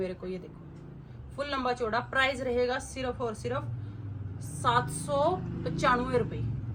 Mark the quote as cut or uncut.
uncut